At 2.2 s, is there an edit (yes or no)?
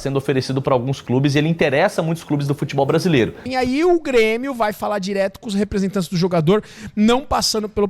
no